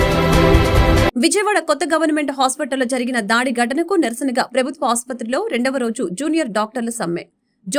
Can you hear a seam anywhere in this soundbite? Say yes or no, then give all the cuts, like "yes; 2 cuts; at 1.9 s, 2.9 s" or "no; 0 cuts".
yes; 1 cut; at 1.1 s